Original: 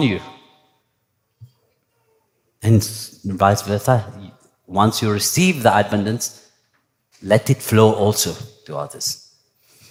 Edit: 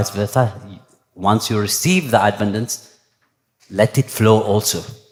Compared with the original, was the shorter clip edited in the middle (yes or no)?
no